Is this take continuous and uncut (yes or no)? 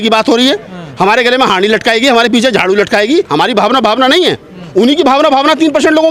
yes